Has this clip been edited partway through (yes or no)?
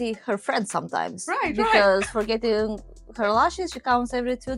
no